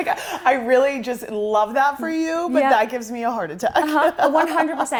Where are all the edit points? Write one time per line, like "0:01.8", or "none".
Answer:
none